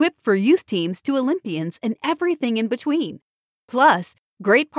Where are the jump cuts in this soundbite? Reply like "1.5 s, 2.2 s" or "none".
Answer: none